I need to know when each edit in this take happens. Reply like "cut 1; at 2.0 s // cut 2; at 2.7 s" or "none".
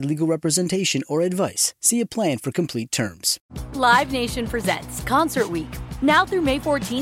cut 1; at 3.4 s